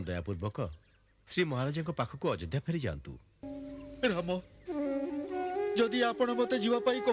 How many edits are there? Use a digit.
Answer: 1